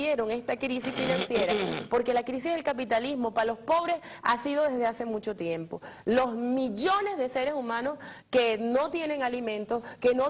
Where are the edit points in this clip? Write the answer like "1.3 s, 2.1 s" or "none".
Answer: 6.7 s